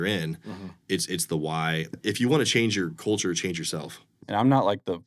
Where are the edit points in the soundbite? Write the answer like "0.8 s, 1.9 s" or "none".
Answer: 1.9 s, 4.1 s